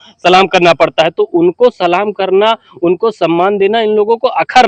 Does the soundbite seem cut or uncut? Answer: uncut